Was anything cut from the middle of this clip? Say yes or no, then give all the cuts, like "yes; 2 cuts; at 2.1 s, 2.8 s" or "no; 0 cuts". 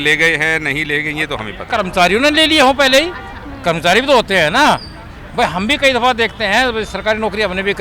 yes; 1 cut; at 1.7 s